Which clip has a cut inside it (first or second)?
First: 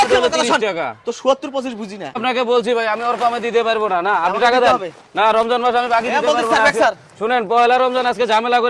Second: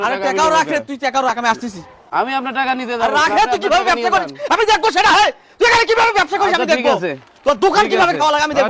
first